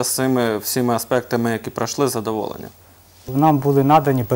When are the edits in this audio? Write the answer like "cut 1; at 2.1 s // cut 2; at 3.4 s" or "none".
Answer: cut 1; at 3.2 s